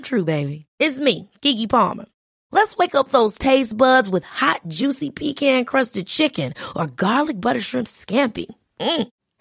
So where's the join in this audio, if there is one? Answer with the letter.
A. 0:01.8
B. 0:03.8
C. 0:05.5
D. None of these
D